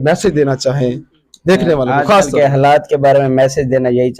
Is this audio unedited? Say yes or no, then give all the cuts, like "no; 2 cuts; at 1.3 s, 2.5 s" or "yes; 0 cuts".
yes; 0 cuts